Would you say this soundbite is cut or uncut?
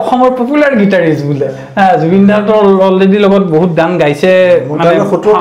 uncut